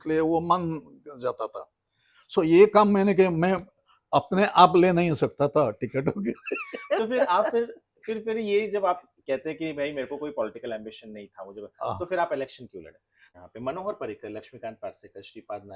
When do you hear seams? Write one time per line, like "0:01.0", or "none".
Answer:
0:13.0